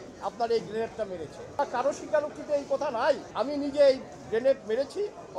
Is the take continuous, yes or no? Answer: no